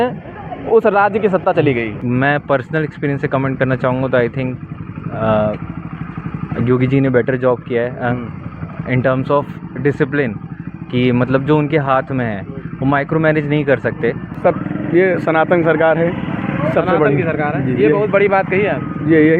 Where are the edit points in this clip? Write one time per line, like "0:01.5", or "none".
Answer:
0:02.0
0:14.3